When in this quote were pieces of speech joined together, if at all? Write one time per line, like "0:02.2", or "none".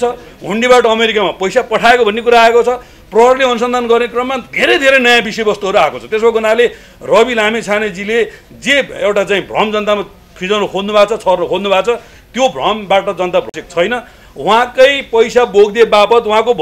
none